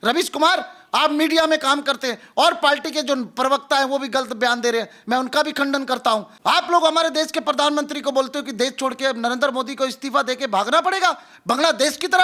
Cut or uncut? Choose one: cut